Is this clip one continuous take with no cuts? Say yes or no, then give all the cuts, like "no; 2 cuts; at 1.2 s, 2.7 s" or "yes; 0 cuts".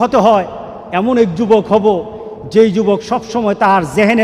yes; 0 cuts